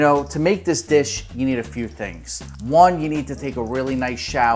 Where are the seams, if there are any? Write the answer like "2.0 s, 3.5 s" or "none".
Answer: none

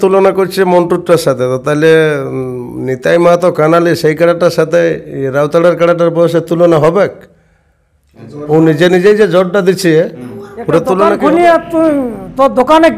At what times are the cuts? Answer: 11.2 s

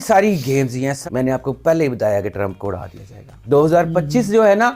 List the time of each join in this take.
1.0 s, 3.3 s

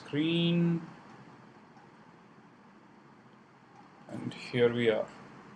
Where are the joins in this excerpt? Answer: none

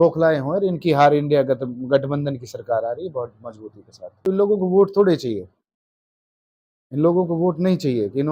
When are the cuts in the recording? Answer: 4.0 s

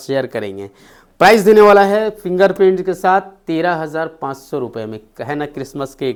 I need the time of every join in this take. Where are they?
none

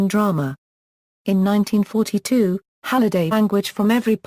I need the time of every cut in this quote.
none

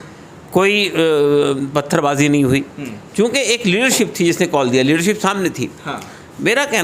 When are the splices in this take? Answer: none

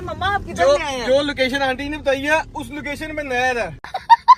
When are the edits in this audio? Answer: none

